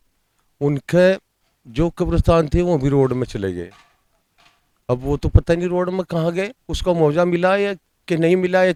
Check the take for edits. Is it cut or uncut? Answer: uncut